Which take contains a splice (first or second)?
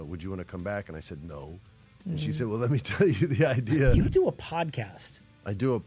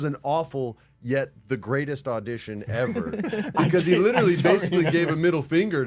first